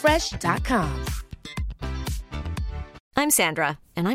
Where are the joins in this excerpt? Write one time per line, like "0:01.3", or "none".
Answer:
0:03.0